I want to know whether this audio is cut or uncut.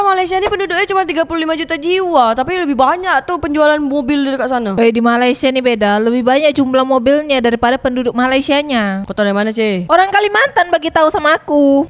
uncut